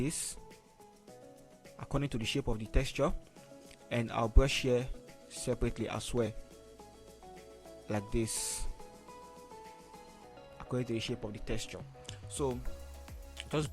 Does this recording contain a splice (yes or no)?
no